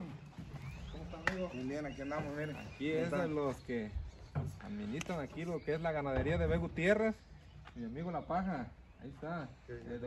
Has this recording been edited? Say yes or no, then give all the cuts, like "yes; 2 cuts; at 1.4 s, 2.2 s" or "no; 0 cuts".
no; 0 cuts